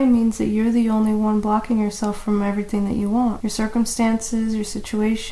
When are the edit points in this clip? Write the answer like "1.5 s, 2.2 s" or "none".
3.4 s